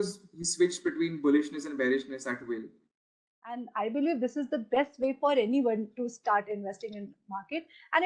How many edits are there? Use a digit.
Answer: 1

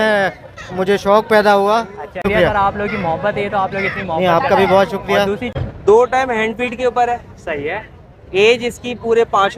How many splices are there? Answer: 2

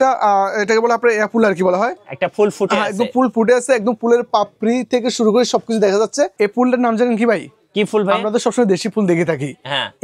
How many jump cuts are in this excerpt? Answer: 1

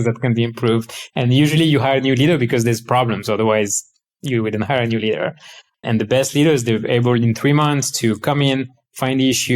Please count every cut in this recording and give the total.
1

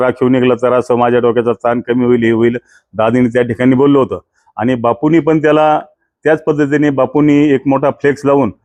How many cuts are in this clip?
0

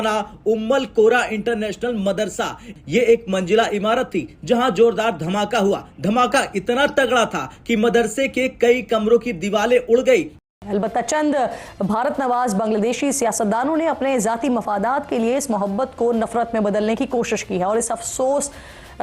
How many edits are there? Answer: 1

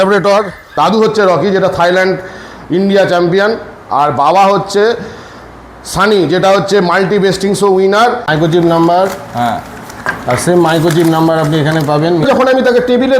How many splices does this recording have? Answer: 3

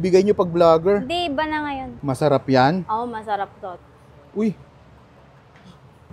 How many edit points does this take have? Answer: 1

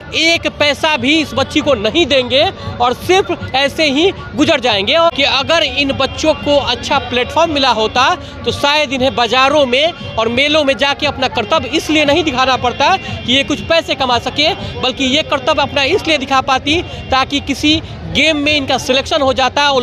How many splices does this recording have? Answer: 1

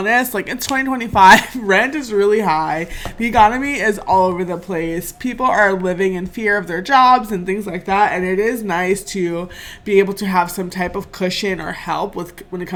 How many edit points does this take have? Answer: 0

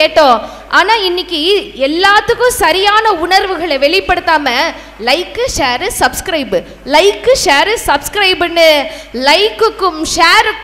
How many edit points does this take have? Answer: 0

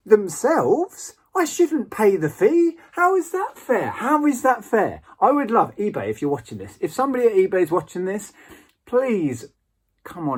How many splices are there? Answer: 0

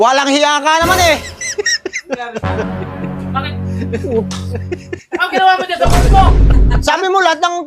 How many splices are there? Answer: 1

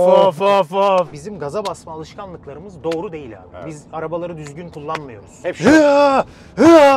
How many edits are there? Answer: 2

